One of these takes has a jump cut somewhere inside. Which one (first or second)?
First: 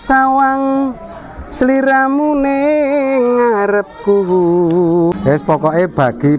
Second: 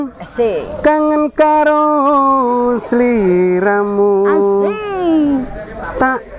first